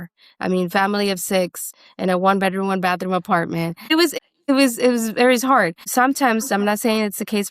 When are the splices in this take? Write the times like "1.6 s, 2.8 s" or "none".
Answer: 4.0 s